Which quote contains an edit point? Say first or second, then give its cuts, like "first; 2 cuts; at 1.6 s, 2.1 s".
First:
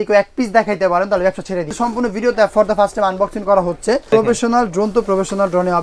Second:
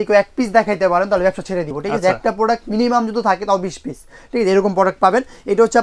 first; 2 cuts; at 1.7 s, 4.1 s